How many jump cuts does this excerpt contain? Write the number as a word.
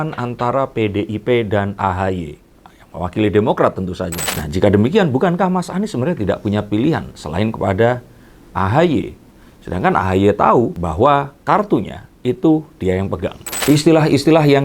two